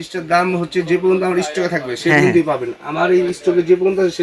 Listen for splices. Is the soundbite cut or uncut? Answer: uncut